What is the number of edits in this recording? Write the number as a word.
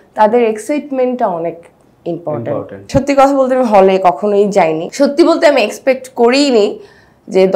two